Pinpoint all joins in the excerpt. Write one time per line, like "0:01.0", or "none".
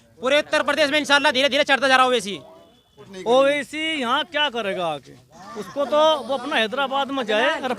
0:03.1